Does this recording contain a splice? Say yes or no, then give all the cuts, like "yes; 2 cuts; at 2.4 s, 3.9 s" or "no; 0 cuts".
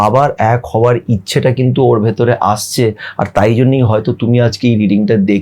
no; 0 cuts